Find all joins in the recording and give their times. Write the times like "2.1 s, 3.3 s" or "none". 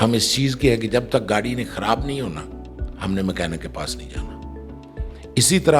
none